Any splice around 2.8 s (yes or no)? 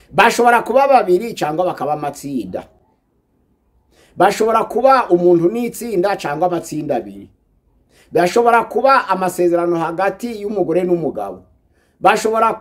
no